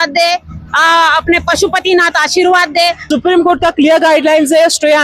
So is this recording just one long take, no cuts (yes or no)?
no